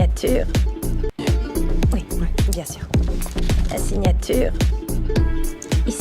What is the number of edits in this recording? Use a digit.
1